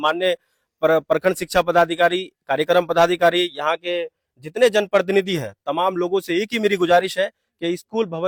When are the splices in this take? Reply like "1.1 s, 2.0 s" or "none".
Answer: none